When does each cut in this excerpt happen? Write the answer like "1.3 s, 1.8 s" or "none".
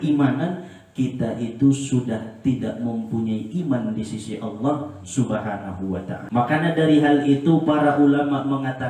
6.2 s